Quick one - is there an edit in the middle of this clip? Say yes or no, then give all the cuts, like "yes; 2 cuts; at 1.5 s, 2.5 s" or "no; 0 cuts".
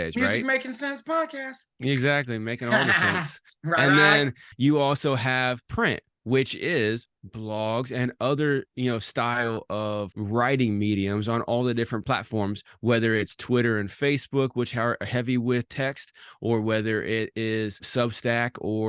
yes; 5 cuts; at 4.5 s, 5.6 s, 10.2 s, 12.0 s, 17.8 s